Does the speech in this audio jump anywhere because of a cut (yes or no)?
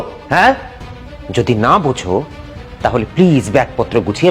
no